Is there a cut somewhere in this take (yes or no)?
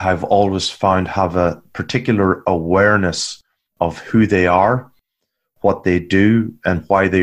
no